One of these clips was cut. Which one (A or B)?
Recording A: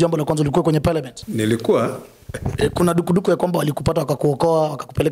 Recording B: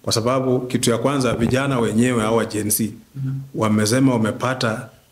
A